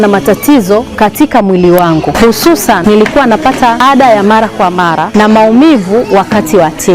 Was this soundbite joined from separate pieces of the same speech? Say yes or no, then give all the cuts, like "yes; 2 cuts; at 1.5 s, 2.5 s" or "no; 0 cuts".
yes; 3 cuts; at 2.8 s, 3.8 s, 5.0 s